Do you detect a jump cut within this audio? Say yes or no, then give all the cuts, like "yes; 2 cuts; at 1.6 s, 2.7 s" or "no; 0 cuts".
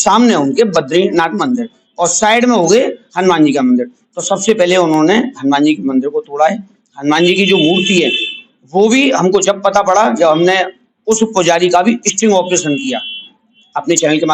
no; 0 cuts